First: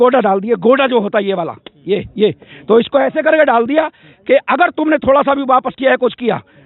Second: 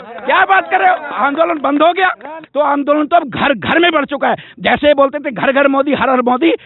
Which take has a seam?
second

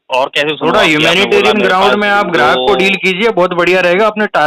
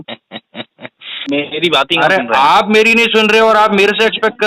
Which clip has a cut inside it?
second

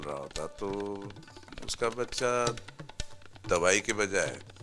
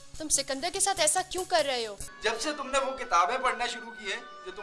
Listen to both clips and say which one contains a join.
second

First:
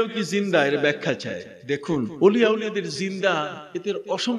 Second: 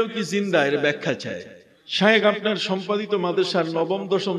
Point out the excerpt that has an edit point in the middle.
second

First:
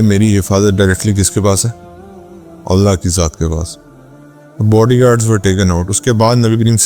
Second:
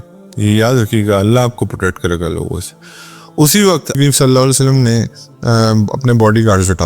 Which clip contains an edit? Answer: second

